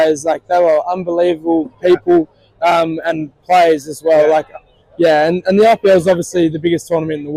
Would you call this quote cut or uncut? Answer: uncut